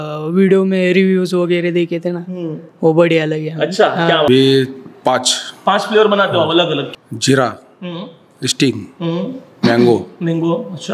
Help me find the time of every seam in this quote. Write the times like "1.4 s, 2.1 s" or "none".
4.3 s, 6.9 s